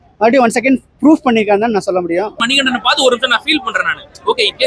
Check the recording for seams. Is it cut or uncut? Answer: cut